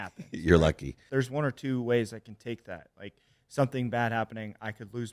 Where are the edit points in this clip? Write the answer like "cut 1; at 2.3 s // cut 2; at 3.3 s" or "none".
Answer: cut 1; at 0.9 s